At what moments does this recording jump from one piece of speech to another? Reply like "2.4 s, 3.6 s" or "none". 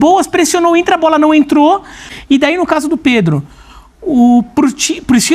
2.1 s